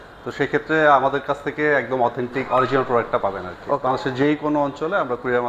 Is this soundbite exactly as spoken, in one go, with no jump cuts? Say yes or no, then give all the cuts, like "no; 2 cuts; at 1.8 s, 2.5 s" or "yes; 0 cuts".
no; 1 cut; at 3.8 s